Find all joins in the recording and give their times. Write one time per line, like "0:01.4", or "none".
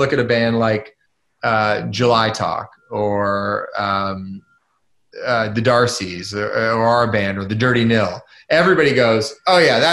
none